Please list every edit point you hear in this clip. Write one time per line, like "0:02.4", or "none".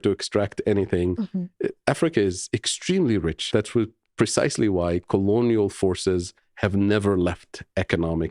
0:03.4